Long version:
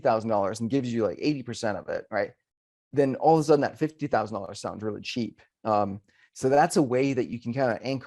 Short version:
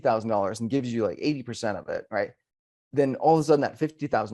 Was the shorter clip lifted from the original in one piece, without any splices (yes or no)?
yes